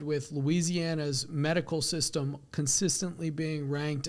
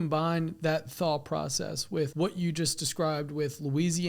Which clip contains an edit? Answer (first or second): second